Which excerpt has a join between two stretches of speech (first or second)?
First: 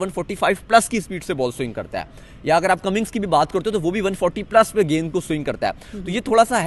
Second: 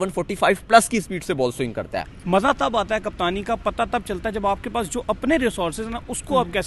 second